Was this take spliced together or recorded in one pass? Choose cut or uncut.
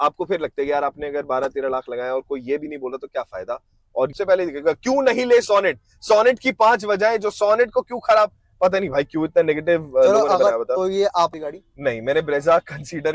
cut